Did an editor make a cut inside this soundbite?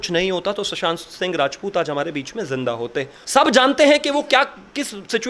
yes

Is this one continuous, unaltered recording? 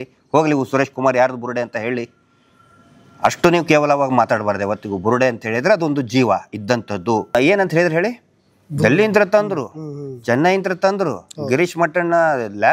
no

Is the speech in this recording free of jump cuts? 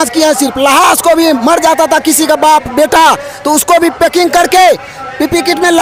yes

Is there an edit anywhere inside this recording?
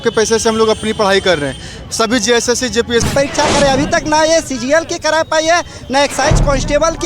yes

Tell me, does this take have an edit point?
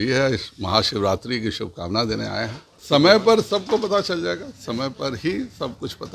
yes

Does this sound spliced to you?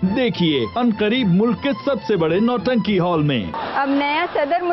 yes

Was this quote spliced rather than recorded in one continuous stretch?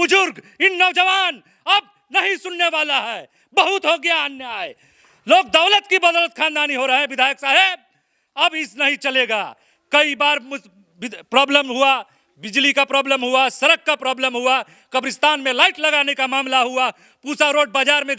no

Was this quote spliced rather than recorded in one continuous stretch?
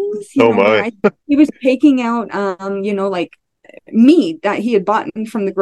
yes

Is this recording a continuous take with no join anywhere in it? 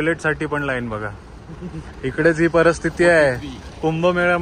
yes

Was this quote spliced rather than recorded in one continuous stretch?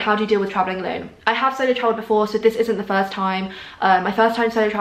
no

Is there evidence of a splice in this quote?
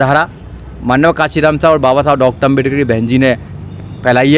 no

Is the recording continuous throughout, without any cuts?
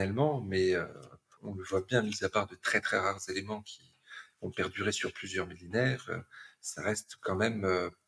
yes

